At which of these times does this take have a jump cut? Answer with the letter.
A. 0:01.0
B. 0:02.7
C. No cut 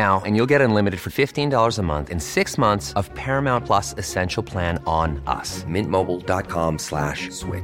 C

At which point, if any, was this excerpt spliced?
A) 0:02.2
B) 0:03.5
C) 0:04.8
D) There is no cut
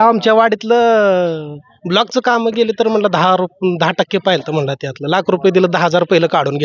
D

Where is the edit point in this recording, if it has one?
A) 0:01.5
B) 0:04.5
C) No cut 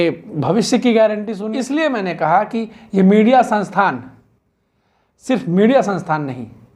A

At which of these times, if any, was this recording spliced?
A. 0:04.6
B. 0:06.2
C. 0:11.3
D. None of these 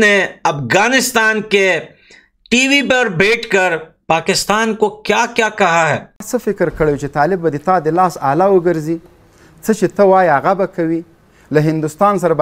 B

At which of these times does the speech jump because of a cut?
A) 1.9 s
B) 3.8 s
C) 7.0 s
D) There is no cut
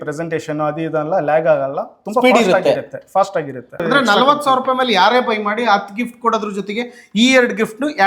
B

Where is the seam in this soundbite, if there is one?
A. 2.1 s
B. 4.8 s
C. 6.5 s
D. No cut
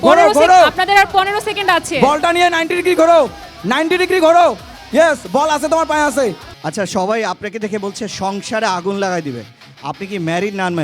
C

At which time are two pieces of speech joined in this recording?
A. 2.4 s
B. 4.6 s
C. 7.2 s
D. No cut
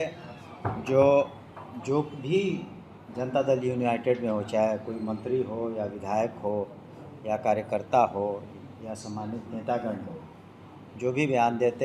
D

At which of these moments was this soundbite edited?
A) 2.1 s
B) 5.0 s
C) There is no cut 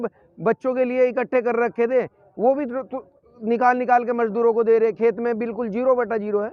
C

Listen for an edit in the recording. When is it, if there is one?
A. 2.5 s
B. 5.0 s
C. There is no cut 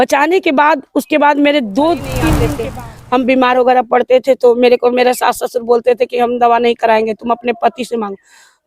A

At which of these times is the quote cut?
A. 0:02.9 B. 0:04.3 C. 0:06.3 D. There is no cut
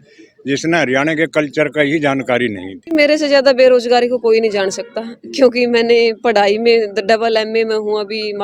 A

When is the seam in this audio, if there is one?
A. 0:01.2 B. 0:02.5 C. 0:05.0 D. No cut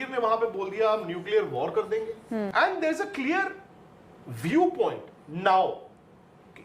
B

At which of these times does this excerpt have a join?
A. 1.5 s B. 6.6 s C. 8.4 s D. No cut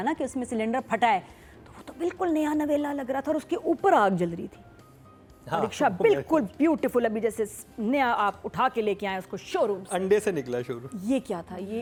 D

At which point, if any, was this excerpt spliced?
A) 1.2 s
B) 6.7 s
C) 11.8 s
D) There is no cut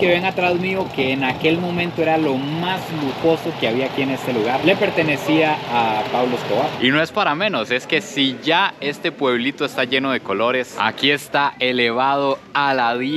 B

